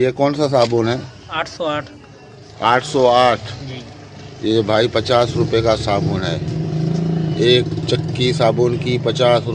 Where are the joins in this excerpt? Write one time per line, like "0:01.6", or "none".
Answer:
none